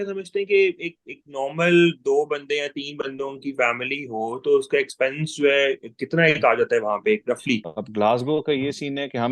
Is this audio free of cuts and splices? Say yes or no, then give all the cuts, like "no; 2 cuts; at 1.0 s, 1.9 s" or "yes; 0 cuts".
no; 1 cut; at 7.8 s